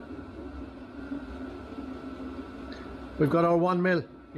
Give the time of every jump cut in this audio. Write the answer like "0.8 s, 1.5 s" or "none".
1.0 s